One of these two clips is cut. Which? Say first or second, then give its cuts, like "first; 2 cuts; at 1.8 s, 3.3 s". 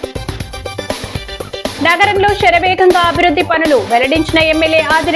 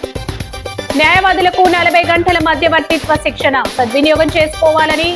second; 1 cut; at 0.9 s